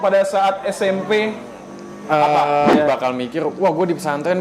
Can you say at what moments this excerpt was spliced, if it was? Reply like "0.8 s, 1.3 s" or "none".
2.7 s